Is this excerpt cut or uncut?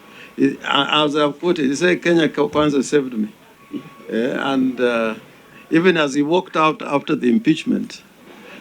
uncut